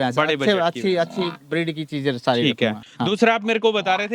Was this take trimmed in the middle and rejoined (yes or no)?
yes